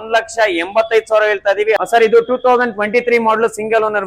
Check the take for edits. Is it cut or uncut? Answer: cut